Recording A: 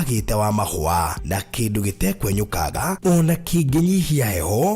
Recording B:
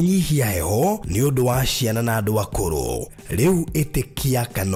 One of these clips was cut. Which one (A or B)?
A